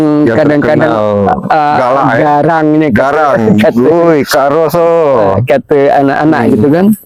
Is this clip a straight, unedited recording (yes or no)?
yes